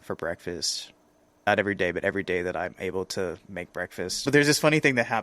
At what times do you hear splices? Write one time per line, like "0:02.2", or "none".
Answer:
0:01.5
0:04.2